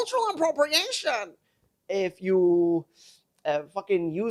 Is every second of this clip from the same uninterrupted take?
yes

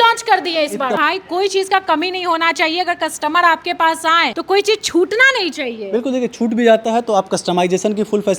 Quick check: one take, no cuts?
no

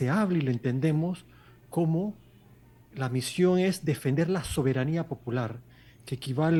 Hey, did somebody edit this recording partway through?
no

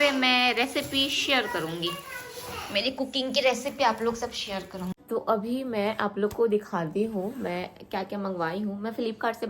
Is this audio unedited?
no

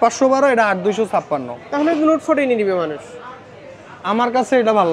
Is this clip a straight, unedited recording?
yes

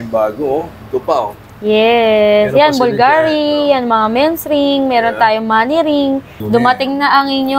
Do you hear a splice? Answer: yes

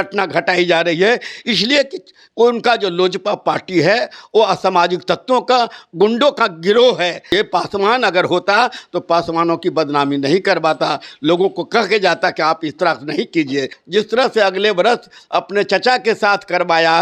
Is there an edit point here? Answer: yes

